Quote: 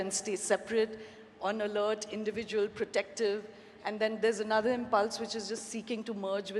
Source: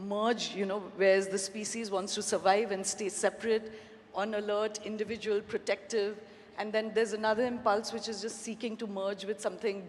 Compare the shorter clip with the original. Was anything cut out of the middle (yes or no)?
no